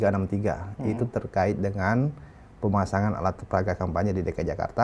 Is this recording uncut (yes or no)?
yes